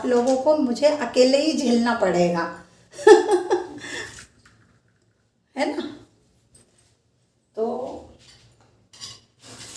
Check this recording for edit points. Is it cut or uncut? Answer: uncut